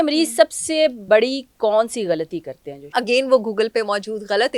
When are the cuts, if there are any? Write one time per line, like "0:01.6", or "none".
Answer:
0:01.0
0:02.9